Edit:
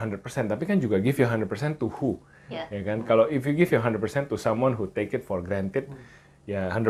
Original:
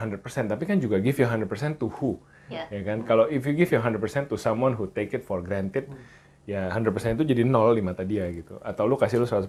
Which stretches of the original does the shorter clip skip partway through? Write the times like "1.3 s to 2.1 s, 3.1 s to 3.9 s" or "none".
none